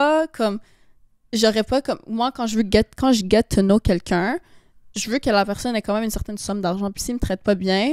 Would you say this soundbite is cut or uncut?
uncut